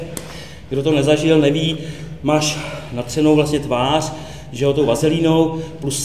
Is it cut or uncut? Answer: uncut